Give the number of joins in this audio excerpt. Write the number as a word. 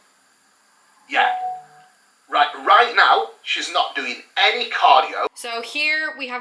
one